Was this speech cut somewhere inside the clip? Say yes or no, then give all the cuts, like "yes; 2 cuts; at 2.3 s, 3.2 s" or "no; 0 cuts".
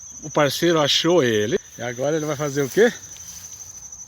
yes; 1 cut; at 1.6 s